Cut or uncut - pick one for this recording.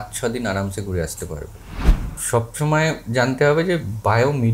cut